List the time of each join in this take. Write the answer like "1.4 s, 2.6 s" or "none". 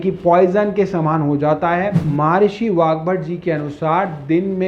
2.0 s